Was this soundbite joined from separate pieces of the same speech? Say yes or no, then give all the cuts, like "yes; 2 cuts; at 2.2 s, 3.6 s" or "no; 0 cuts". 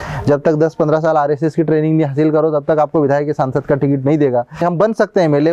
yes; 1 cut; at 4.6 s